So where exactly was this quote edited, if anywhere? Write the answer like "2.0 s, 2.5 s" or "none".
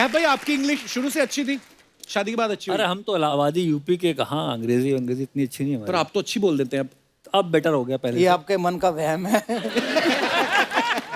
none